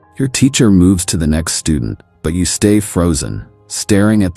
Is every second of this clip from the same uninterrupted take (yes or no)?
no